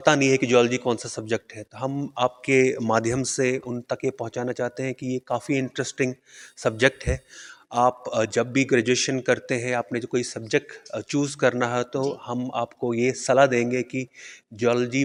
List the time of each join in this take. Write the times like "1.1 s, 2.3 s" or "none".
none